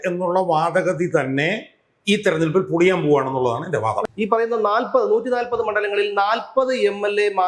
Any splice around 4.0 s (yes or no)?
yes